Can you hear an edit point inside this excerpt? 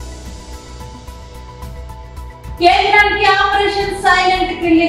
no; 0 cuts

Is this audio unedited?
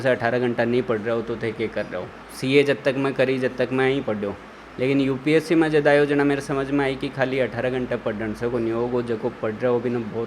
yes; 0 cuts

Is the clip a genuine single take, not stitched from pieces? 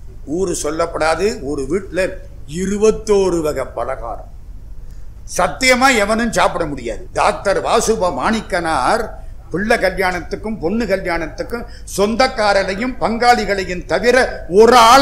no; 1 cut; at 7.0 s

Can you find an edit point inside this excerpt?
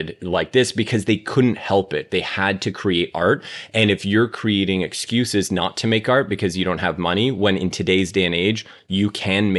no; 0 cuts

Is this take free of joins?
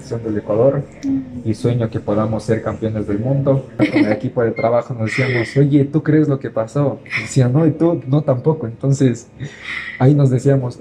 no; 1 cut; at 3.8 s

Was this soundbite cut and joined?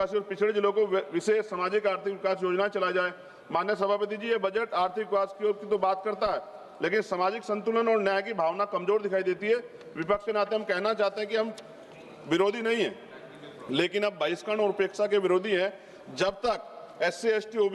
no; 0 cuts

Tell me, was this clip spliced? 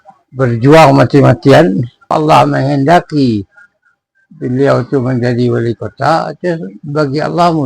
yes; 1 cut; at 2.1 s

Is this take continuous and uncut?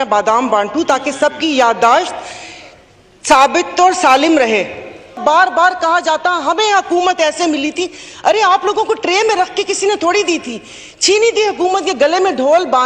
no; 1 cut; at 5.2 s

